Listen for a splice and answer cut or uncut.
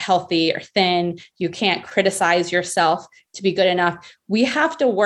uncut